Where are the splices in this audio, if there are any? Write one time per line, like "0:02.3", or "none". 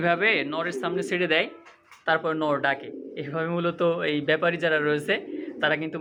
none